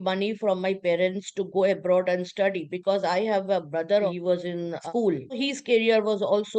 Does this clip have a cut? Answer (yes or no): yes